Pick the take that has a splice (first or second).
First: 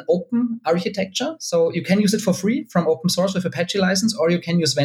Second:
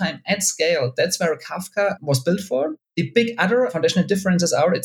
second